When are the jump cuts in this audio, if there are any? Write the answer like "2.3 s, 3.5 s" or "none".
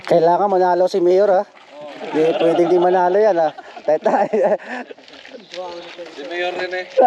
none

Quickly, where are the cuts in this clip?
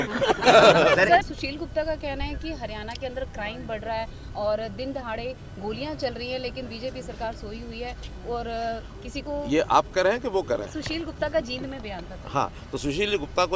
1.2 s

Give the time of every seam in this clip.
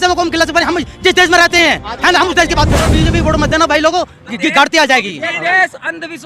2.7 s

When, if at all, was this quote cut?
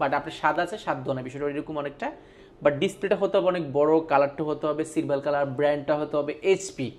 none

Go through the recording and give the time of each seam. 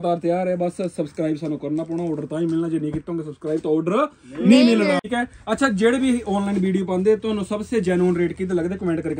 5.0 s

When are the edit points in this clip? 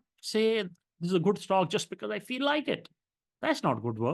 none

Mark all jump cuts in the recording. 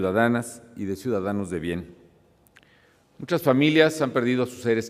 1.6 s

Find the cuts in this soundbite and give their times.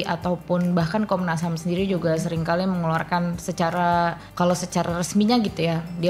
4.2 s

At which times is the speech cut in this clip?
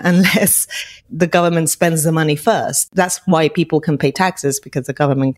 2.9 s

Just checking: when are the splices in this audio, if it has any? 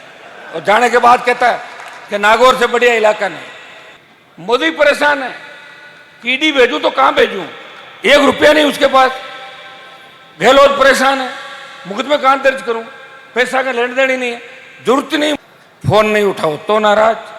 4.1 s, 15.4 s

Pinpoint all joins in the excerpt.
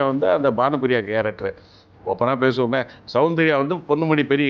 1.9 s

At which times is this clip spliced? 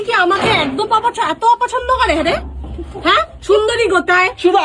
none

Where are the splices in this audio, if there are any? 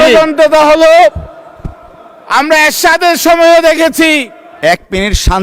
4.4 s

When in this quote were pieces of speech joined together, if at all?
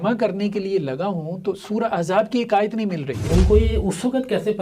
3.2 s

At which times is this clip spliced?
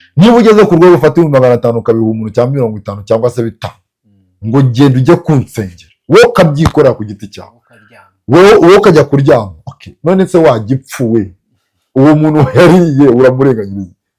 none

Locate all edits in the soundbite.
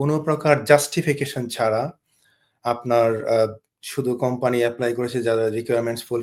none

